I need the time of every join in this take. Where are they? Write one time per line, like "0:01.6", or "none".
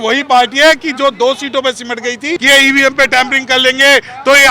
0:02.4